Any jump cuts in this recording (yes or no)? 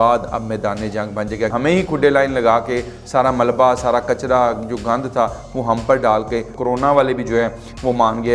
yes